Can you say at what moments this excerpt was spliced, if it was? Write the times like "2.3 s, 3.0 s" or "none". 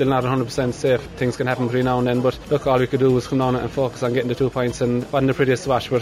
1.1 s, 2.4 s, 5.1 s